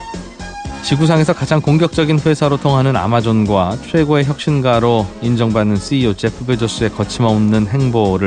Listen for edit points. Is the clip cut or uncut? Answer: cut